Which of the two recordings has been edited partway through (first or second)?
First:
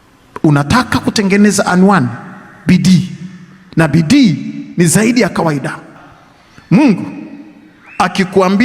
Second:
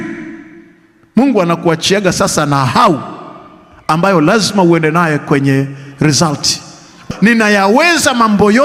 first